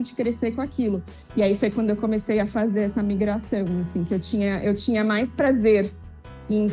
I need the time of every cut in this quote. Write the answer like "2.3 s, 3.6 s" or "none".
1.1 s